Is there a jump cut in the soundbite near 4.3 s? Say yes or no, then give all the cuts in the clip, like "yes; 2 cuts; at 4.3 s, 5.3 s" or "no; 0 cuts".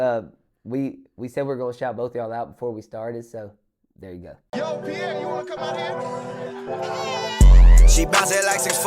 yes; 1 cut; at 4.3 s